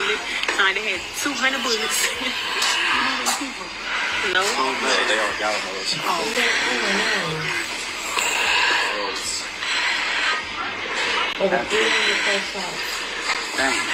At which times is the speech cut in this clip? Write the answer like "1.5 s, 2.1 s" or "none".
none